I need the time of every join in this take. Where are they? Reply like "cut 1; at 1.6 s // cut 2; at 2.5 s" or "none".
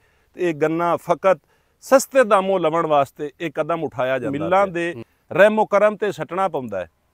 cut 1; at 4.4 s